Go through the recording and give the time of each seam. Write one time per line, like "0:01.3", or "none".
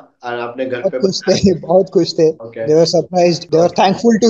0:02.5
0:03.4